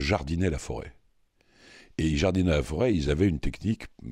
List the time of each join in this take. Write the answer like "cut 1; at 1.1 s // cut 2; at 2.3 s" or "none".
none